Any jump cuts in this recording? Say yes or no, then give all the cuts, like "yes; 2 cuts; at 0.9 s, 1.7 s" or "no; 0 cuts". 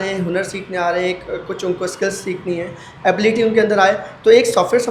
no; 0 cuts